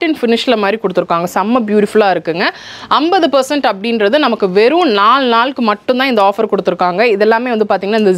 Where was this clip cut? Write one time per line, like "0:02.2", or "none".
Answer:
none

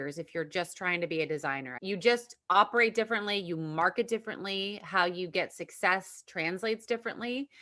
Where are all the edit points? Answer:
0:01.7

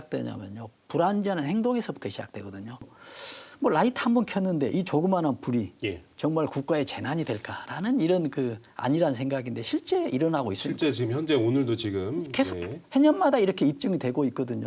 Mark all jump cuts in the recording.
0:02.8

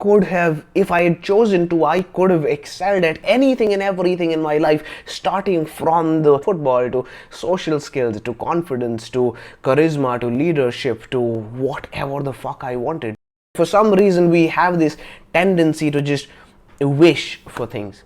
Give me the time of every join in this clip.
0:03.2
0:06.4
0:13.6

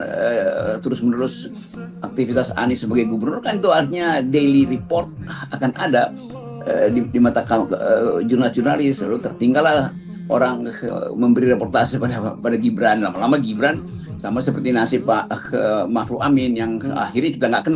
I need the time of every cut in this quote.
none

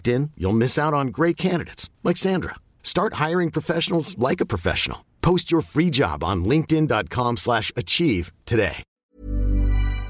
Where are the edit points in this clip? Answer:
0:08.9

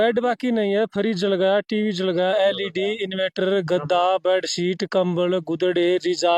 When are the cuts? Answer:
none

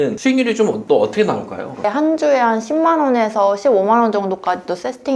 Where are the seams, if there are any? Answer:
0:01.8

